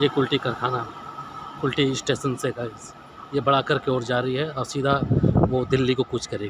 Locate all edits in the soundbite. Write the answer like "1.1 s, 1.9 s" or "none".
none